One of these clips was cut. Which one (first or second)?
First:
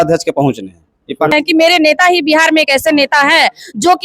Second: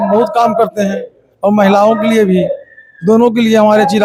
first